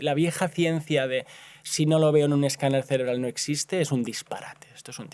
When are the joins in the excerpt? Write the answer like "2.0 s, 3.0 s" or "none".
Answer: none